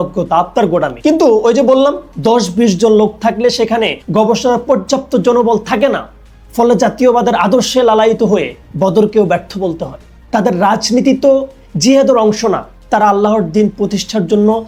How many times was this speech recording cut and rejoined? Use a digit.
0